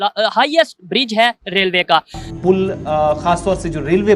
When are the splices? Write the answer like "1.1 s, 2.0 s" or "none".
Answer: 2.2 s